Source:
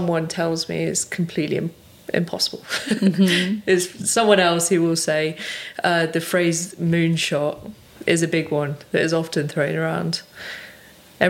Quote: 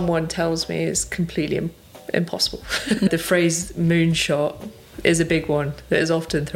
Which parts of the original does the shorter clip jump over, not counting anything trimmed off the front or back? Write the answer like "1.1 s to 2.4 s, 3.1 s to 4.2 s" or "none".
3.1 s to 6.1 s